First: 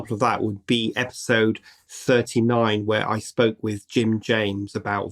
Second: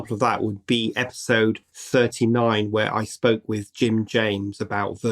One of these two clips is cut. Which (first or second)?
second